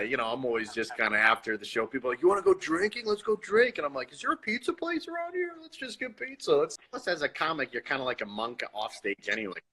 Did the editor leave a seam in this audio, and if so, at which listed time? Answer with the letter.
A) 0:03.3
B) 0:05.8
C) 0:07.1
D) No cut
C